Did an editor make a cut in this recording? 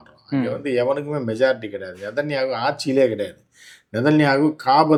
no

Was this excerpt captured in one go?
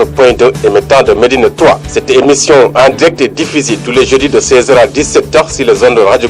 yes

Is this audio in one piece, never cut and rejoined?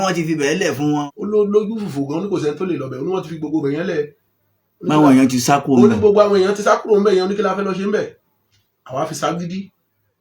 no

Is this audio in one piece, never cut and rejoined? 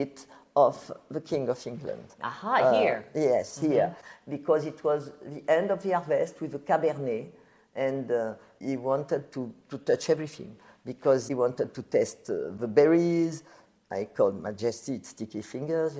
no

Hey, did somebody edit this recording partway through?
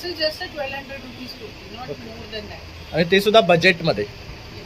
no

